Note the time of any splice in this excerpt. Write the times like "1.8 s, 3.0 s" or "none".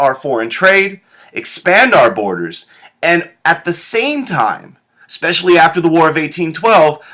none